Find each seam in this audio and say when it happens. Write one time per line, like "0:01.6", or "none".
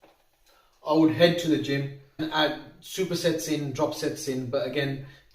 0:02.2